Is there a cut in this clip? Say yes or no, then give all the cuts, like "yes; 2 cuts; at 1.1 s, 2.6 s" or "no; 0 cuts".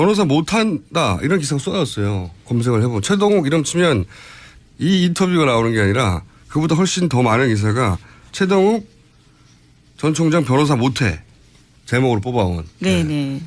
no; 0 cuts